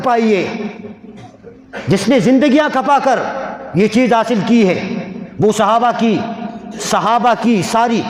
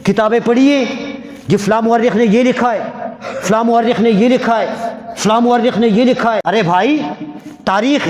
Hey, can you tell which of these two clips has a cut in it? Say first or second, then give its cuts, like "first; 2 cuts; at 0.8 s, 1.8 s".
second; 1 cut; at 6.4 s